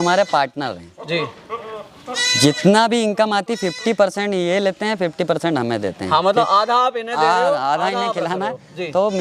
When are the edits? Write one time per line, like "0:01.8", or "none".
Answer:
none